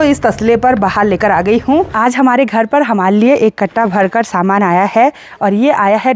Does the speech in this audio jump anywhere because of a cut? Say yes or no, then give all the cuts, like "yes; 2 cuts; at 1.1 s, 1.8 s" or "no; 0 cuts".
yes; 1 cut; at 1.9 s